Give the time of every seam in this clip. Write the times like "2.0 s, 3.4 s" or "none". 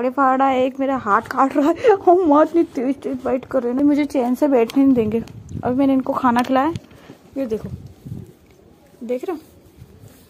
3.8 s